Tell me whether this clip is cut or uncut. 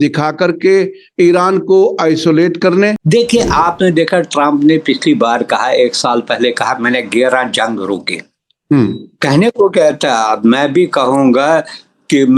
cut